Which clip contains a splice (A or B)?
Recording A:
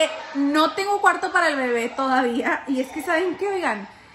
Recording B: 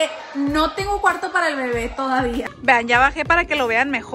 B